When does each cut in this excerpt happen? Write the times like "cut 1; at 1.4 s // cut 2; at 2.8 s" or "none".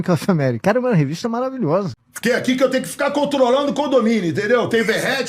cut 1; at 1.9 s